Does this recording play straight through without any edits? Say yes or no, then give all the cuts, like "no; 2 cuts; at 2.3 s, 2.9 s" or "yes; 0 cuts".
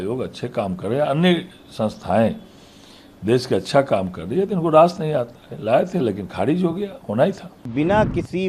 no; 1 cut; at 7.5 s